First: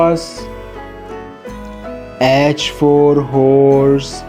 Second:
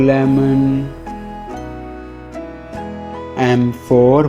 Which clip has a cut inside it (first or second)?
second